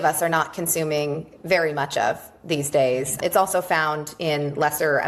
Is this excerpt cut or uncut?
uncut